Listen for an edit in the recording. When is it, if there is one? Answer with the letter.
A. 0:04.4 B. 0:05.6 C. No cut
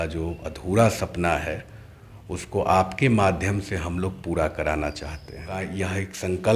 B